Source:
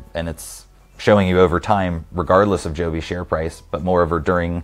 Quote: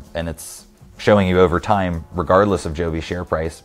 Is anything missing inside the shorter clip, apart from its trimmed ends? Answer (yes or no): no